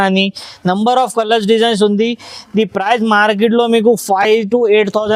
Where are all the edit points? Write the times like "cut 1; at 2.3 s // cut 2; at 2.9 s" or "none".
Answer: none